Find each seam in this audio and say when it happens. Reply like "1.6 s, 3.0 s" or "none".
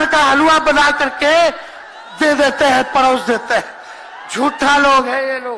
none